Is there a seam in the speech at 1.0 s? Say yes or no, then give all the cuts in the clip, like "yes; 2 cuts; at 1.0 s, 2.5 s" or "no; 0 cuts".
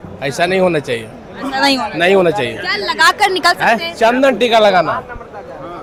no; 0 cuts